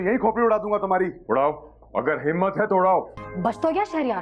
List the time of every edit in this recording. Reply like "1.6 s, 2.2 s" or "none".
3.2 s